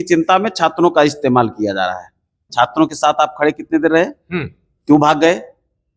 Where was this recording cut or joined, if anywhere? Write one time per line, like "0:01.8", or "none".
0:02.4